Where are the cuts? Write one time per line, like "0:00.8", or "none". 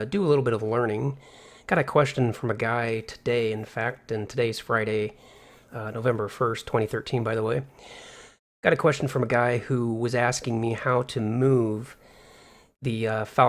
0:10.1